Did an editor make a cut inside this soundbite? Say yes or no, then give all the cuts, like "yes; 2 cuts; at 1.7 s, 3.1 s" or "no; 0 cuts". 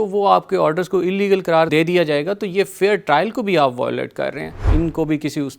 yes; 1 cut; at 4.7 s